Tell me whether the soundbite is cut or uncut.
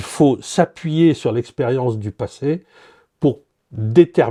uncut